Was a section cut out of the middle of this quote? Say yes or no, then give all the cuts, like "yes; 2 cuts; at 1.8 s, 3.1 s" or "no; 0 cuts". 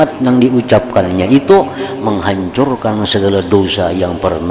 no; 0 cuts